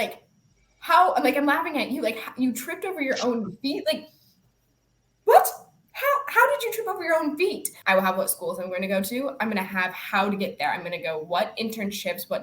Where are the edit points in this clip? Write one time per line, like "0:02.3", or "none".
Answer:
0:07.7